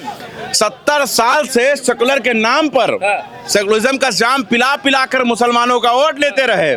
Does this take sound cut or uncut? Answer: uncut